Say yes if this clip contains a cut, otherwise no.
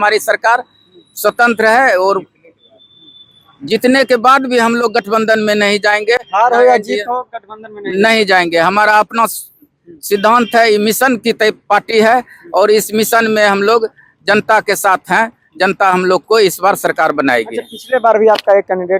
no